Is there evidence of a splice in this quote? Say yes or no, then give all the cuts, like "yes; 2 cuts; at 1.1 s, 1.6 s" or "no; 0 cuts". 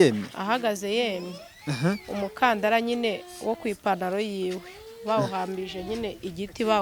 no; 0 cuts